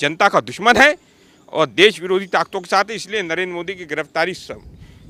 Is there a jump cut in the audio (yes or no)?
no